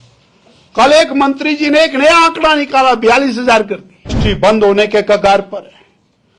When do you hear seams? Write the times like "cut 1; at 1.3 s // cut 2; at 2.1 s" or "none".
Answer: cut 1; at 4.2 s